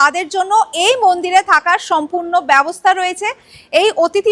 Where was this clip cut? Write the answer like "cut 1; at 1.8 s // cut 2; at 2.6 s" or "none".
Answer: none